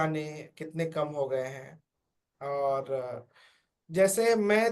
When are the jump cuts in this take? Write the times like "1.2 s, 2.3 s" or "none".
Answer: none